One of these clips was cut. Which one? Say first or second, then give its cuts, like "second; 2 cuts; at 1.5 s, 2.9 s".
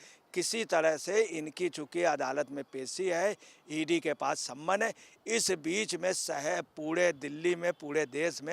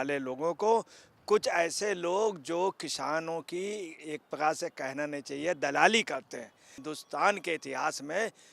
second; 1 cut; at 6.8 s